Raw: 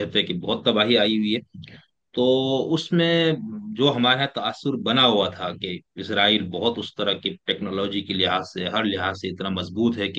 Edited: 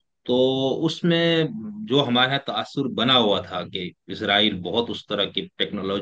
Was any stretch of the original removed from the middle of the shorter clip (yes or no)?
no